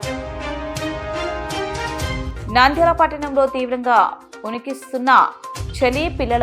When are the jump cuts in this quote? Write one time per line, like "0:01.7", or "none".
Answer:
none